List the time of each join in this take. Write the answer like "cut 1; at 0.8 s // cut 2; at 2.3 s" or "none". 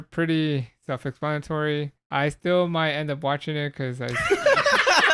cut 1; at 2.0 s